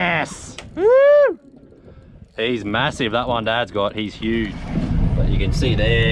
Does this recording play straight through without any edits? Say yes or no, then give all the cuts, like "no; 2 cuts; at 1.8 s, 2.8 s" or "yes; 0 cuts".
no; 1 cut; at 4.6 s